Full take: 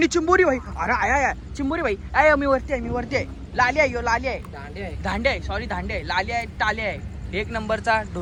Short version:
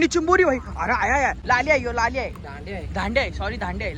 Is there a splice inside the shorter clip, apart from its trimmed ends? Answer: yes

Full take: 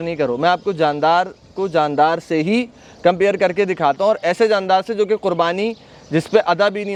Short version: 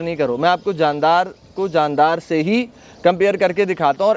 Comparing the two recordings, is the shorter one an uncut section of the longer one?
yes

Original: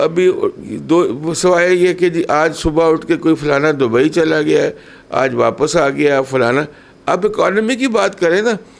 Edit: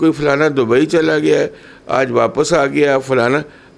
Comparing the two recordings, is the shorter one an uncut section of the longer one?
yes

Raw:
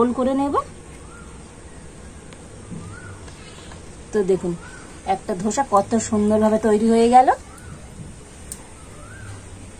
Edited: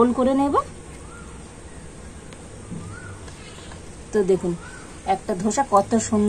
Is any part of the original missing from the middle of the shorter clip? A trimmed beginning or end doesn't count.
no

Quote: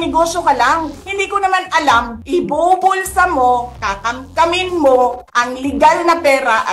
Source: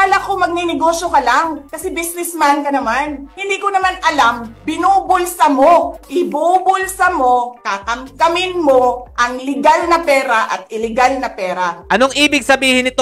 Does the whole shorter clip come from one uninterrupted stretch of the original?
no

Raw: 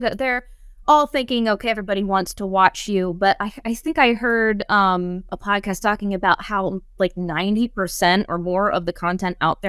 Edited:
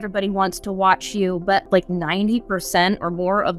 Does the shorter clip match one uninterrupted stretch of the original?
no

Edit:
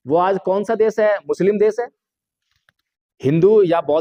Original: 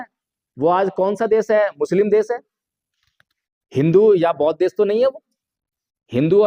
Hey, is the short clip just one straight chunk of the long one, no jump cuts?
yes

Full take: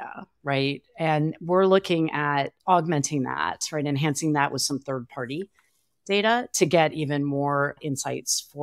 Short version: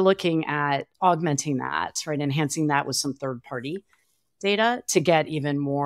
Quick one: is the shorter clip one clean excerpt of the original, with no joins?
yes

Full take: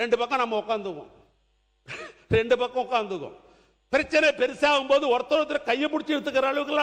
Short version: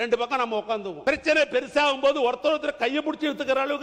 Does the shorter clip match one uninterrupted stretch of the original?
no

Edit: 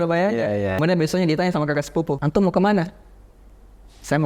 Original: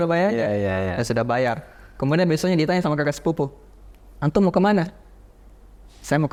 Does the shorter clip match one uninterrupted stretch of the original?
no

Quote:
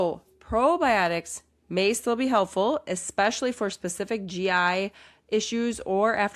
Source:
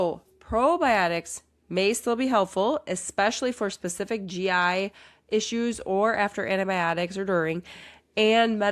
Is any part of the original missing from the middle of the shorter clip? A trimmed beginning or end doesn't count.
no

